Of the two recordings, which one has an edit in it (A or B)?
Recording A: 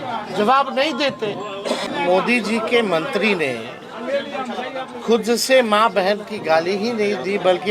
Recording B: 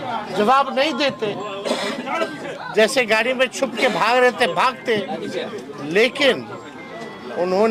A